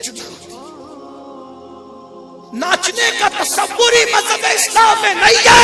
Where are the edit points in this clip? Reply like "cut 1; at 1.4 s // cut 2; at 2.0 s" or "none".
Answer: none